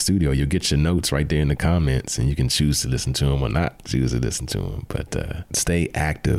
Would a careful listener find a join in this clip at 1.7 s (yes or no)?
no